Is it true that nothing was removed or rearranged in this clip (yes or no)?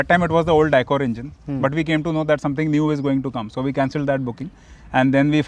yes